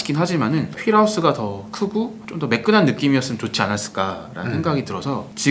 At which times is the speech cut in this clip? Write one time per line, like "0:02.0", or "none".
none

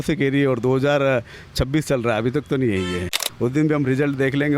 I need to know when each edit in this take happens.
0:03.3

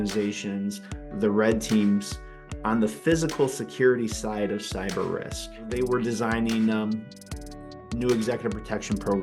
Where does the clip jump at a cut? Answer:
0:05.7

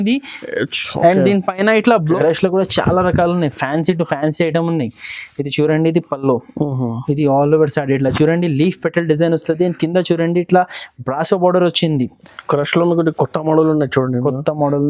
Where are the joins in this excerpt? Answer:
0:02.0

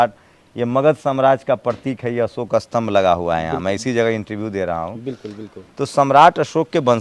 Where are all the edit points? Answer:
none

